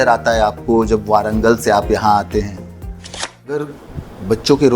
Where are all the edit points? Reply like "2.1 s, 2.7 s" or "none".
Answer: 3.3 s